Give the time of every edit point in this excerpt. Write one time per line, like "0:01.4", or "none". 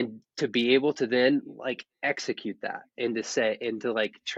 none